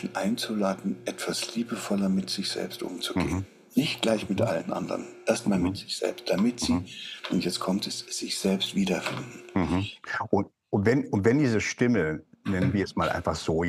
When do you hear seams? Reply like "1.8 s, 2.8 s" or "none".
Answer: 9.9 s